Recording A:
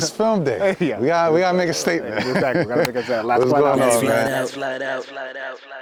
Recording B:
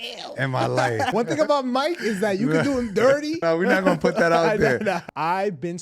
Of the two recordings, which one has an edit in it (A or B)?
B